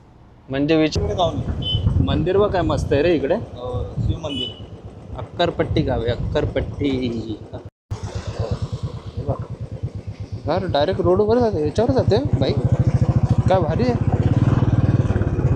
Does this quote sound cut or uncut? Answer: cut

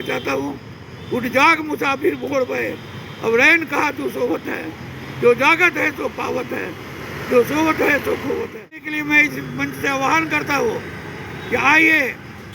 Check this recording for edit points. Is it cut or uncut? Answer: cut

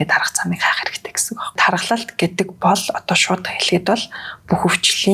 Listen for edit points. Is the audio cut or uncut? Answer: cut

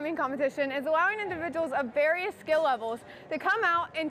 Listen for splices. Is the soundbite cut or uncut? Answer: uncut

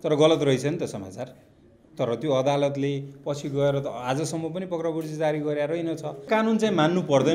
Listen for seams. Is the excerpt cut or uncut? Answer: cut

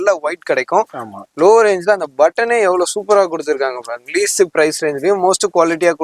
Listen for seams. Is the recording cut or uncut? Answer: uncut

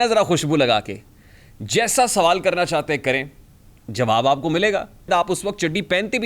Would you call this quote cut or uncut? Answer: cut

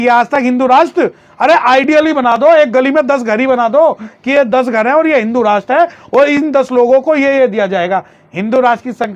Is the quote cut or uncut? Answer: uncut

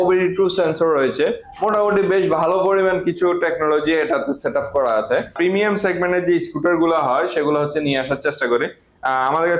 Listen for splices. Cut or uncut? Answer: cut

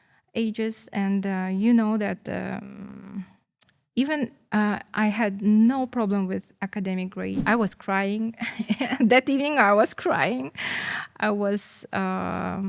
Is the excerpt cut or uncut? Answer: cut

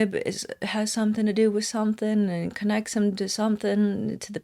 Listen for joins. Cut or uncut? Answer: uncut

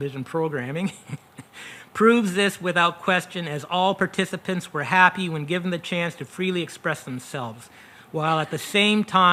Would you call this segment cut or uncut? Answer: uncut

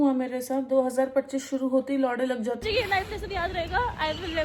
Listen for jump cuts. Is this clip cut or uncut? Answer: cut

